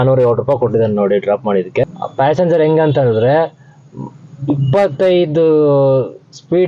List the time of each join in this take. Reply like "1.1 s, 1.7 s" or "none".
2.0 s

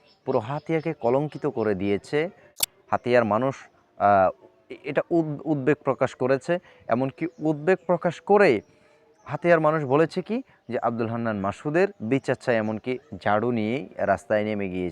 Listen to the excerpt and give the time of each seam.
2.7 s

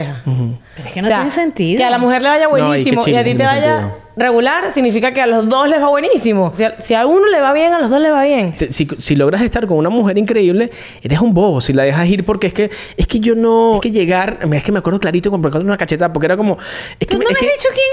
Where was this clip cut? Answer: 6.5 s, 8.5 s, 13.8 s

